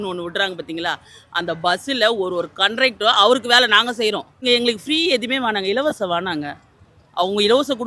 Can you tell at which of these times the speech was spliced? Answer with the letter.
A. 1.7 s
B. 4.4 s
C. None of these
B